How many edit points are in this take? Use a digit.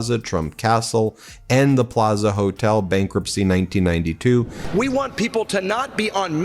1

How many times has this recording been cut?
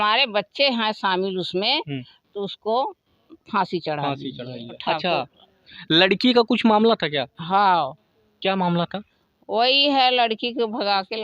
1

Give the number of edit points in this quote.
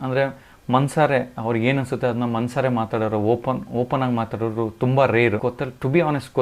1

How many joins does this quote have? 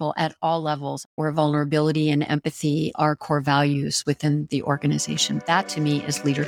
2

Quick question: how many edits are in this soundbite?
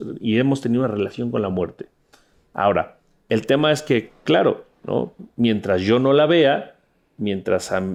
0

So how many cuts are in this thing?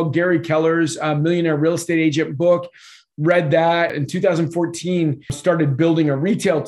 2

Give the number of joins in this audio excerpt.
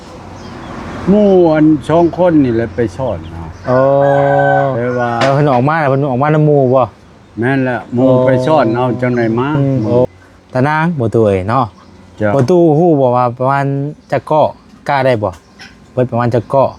1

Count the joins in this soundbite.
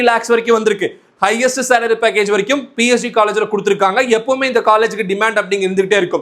0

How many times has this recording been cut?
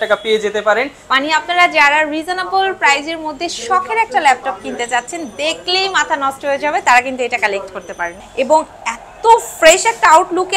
2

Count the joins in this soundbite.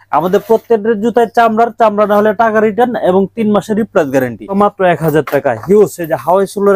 1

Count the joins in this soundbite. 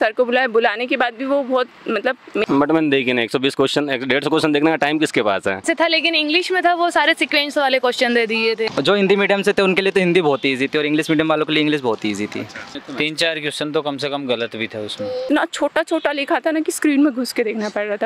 5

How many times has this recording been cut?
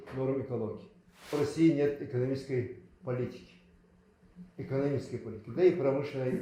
1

